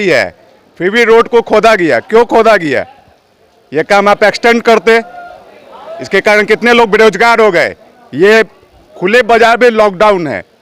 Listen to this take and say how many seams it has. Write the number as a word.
zero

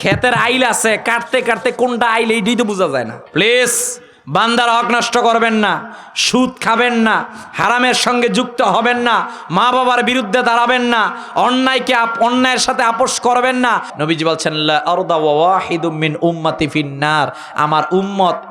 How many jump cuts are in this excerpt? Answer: two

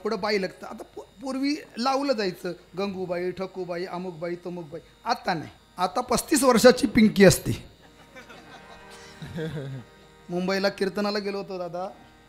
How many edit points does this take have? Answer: one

